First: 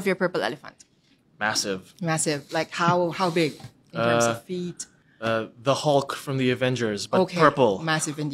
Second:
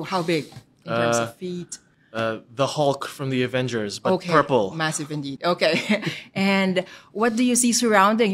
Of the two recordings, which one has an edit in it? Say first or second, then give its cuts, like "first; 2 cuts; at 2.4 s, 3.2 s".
first; 1 cut; at 1.2 s